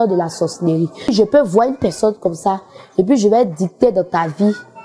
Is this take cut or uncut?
cut